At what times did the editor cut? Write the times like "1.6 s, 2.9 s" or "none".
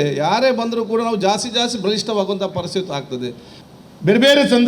3.5 s